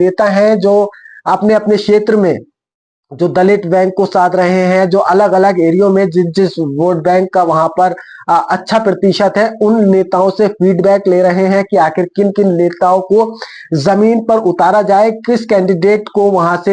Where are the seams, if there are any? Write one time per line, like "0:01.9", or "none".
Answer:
none